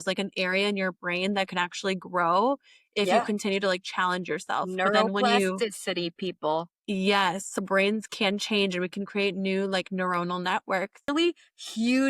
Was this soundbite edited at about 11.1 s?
yes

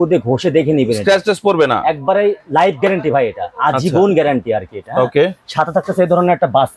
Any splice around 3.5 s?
no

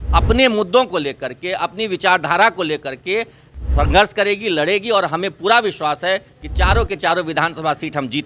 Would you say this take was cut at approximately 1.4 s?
no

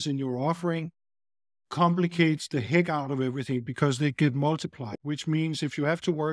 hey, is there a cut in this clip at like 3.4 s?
no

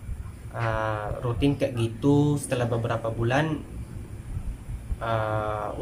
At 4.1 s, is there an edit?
no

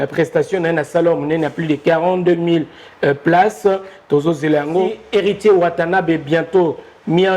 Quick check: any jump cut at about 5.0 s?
yes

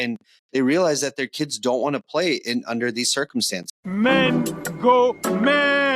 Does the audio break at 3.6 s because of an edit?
yes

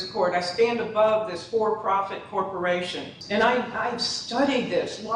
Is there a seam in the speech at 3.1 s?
yes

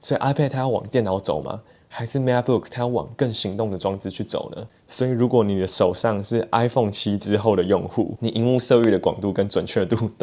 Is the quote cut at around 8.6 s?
no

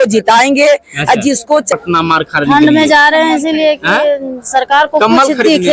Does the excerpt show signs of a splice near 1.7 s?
yes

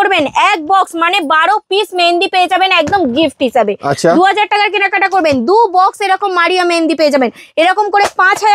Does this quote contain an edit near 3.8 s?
no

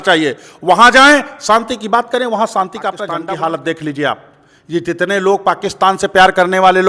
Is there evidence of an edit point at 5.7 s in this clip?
no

